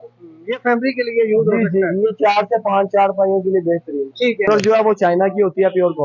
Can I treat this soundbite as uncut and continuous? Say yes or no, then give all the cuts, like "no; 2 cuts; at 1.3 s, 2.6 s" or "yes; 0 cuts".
no; 1 cut; at 4.5 s